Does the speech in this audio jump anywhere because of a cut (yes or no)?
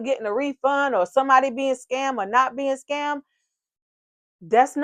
no